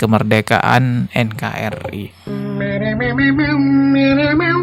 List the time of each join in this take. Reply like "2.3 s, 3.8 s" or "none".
2.0 s